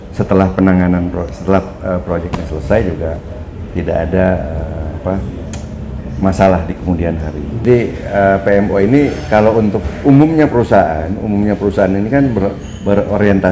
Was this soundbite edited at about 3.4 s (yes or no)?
no